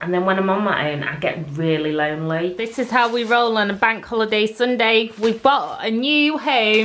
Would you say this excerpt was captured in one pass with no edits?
no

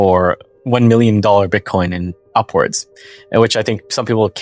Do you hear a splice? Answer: no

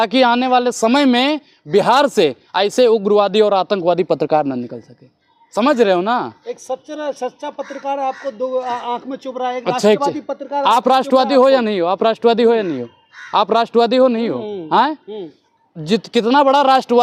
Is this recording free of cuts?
yes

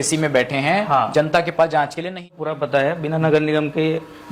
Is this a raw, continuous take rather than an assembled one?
no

